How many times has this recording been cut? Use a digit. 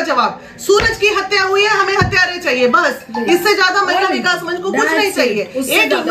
0